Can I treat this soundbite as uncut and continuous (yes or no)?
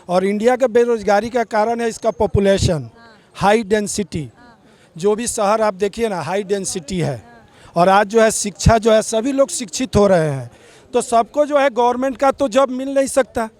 yes